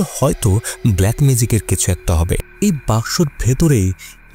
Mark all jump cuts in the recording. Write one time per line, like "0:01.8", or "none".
none